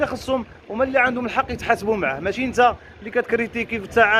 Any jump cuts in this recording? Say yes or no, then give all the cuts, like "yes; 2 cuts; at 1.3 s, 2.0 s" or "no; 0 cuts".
no; 0 cuts